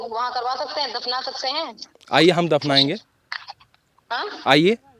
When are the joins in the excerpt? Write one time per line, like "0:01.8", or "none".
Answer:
none